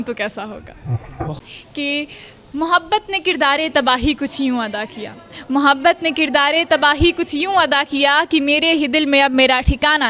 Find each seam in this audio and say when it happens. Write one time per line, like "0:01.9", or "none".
0:01.4